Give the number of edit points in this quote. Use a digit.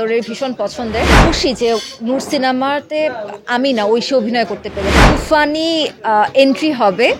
2